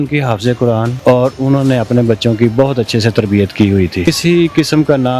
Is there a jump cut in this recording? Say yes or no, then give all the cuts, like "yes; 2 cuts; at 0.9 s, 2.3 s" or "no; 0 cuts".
yes; 2 cuts; at 0.9 s, 4.1 s